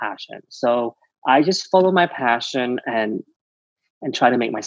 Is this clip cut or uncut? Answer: uncut